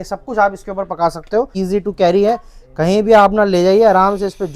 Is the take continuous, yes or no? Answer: no